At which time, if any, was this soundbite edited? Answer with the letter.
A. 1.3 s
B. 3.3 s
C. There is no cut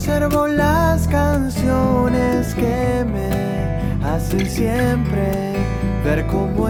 C